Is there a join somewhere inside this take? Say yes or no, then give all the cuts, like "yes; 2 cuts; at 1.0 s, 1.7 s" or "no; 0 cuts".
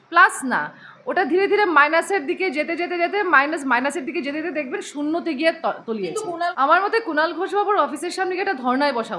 yes; 1 cut; at 6.5 s